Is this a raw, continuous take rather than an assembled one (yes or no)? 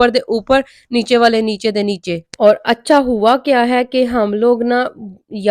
yes